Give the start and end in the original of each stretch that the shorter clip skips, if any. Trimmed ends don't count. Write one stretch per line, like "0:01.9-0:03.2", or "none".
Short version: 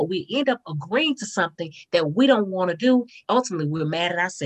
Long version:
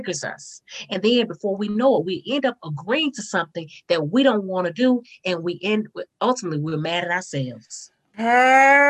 0:05.1-0:06.1